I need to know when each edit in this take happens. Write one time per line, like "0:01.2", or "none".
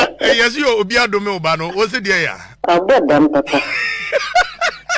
0:02.4